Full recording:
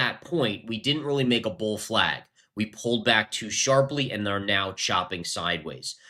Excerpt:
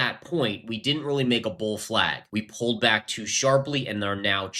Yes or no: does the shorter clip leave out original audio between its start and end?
yes